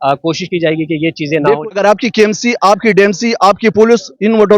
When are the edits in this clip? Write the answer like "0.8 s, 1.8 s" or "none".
1.6 s

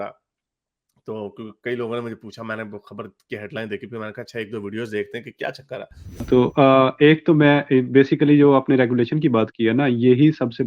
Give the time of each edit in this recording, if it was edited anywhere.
6.3 s

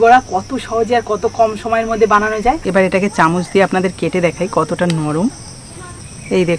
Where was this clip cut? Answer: 2.6 s

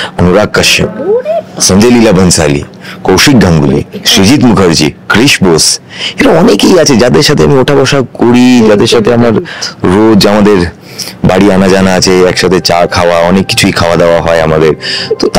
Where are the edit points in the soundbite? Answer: none

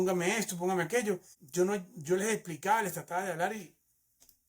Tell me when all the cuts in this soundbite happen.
1.4 s

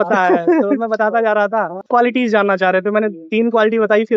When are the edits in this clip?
1.8 s

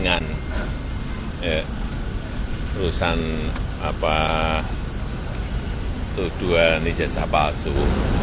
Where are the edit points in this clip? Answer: none

